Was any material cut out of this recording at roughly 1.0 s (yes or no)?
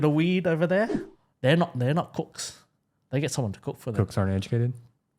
yes